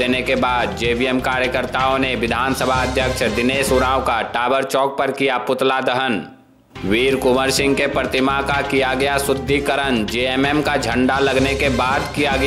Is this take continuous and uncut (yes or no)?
yes